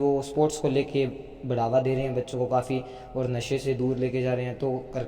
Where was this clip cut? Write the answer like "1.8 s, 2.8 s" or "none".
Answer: none